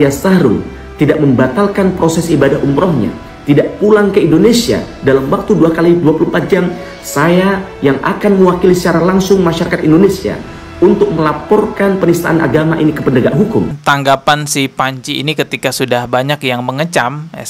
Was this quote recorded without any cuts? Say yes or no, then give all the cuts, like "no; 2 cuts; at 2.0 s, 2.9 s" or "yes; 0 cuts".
no; 1 cut; at 13.8 s